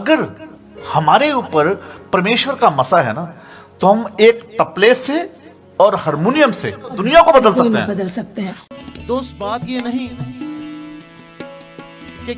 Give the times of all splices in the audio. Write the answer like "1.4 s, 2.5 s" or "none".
7.0 s, 8.9 s